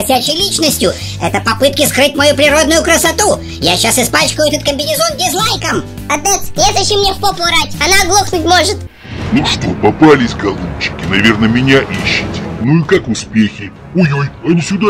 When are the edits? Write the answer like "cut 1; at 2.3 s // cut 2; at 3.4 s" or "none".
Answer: cut 1; at 8.8 s